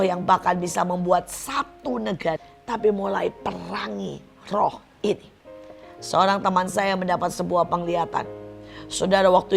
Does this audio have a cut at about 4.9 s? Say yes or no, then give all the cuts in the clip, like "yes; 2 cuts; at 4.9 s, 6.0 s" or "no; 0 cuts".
no; 1 cut; at 2.5 s